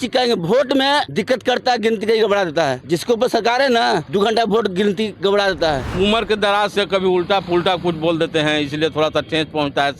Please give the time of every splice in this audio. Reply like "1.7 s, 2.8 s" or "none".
1.1 s, 2.8 s, 4.1 s, 5.9 s